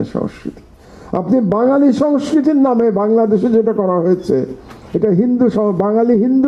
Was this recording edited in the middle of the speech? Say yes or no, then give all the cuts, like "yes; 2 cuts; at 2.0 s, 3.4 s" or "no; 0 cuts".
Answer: no; 0 cuts